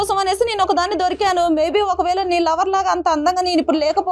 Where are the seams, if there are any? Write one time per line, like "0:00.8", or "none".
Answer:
none